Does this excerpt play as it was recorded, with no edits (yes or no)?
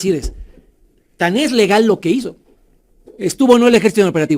yes